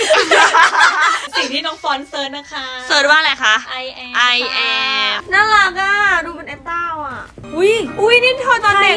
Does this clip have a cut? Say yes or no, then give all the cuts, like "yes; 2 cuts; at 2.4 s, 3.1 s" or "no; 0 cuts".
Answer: yes; 3 cuts; at 1.3 s, 5.2 s, 7.4 s